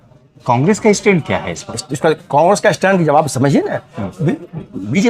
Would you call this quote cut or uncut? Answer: uncut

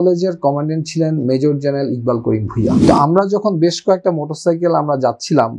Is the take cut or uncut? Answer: cut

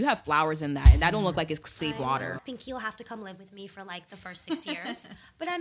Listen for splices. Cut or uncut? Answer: cut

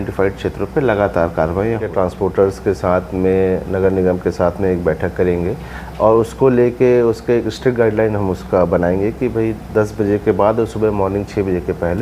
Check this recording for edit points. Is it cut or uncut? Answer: cut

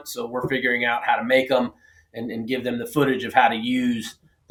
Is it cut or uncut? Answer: uncut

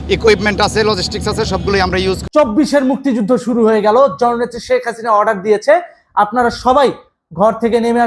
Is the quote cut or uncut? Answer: cut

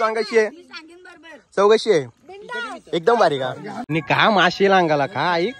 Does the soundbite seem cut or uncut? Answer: cut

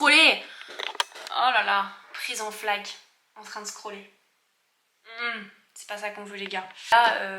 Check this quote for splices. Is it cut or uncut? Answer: uncut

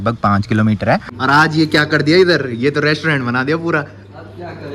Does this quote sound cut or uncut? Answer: cut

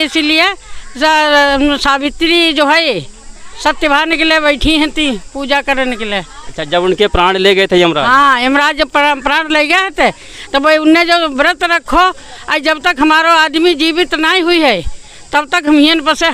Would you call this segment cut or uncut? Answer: uncut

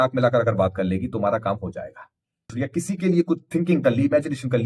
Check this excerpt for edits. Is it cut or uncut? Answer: cut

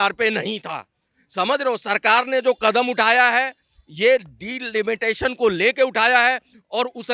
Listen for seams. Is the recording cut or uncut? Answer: uncut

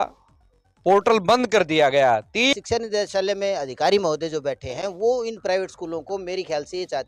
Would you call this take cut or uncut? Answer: cut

